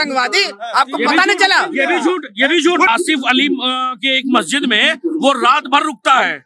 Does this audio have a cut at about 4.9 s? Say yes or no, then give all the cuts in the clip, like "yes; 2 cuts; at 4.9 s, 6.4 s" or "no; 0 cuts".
no; 1 cut; at 2.9 s